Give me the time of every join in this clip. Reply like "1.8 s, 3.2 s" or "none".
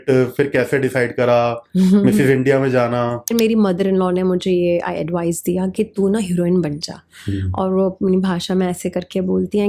3.3 s